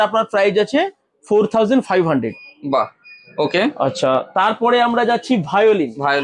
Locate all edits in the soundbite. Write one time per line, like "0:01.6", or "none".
none